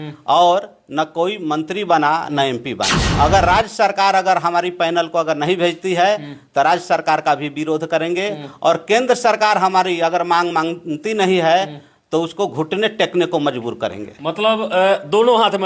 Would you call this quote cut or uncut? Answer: cut